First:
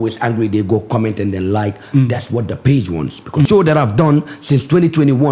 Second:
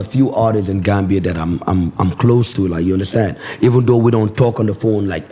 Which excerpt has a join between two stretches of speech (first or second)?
first